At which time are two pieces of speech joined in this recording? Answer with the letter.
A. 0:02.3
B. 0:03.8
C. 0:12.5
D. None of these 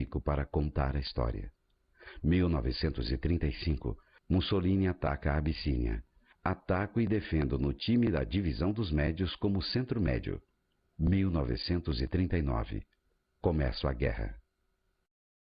B